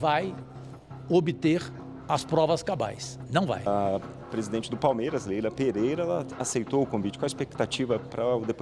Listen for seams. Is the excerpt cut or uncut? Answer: cut